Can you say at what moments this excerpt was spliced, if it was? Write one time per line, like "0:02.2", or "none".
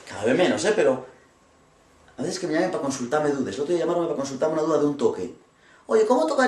0:02.9